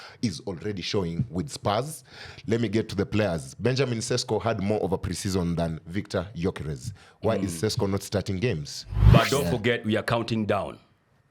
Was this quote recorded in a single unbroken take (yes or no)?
no